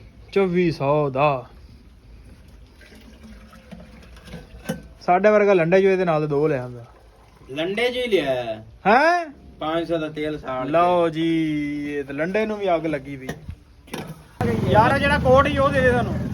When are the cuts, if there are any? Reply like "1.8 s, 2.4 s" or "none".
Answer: 14.3 s

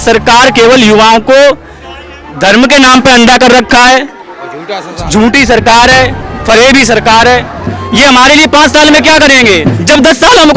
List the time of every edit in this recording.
7.7 s

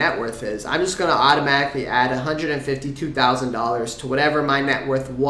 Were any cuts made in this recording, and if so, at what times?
none

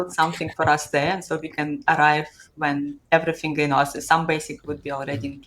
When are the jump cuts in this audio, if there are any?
none

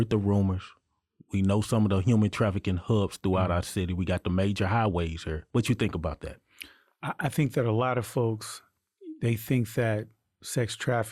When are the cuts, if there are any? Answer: 5.4 s

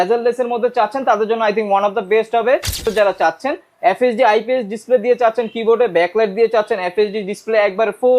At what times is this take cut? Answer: 2.8 s

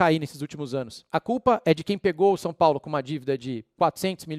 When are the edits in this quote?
1.0 s

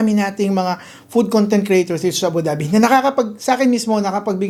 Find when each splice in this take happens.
none

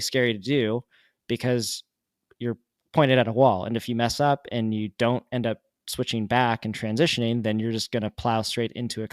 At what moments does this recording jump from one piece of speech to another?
none

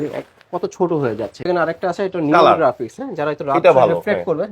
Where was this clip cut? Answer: 1.4 s

